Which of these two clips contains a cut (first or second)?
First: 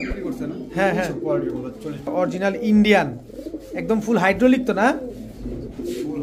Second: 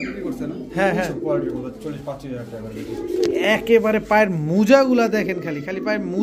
first